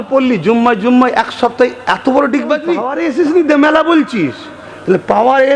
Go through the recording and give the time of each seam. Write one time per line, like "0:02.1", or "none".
0:02.9